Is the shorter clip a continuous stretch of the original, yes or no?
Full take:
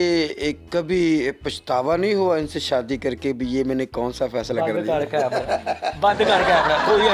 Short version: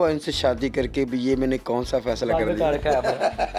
yes